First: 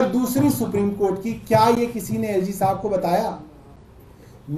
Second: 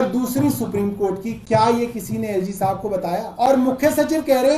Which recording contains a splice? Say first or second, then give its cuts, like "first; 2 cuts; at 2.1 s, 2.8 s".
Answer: second; 1 cut; at 3.3 s